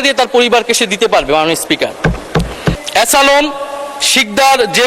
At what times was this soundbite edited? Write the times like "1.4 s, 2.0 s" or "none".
2.8 s